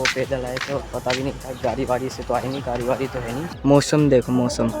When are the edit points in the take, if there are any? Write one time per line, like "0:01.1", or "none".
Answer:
0:03.4

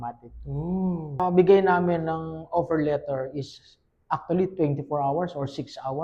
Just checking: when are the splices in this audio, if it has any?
0:01.2

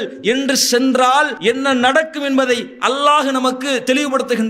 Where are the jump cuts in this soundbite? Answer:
0:01.3

